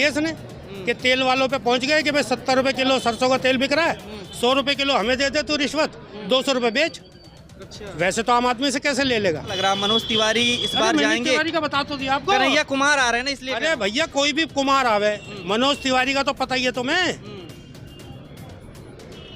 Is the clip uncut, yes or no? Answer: no